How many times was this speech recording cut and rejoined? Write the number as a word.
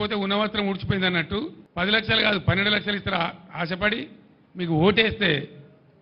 one